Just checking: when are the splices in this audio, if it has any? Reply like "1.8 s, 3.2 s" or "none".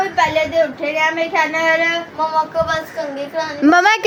none